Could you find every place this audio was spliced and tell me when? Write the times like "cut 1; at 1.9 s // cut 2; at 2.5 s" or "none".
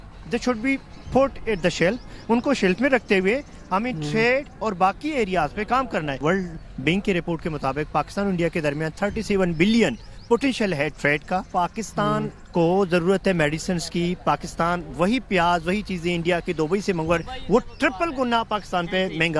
cut 1; at 6.2 s // cut 2; at 11.5 s